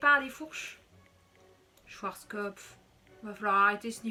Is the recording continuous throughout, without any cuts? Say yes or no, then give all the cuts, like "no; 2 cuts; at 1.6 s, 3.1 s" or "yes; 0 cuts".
yes; 0 cuts